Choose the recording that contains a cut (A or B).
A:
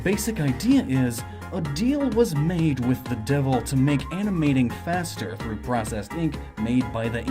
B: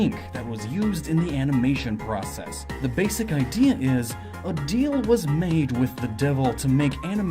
B